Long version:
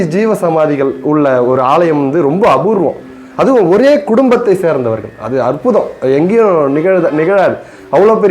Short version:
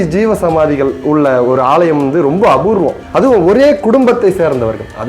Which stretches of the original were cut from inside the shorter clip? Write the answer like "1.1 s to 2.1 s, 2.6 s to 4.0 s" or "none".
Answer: 3.0 s to 3.2 s